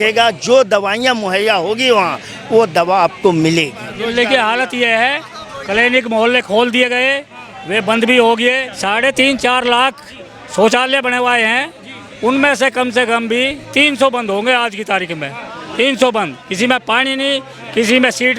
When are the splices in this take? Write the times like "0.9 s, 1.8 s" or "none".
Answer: 4.0 s, 8.7 s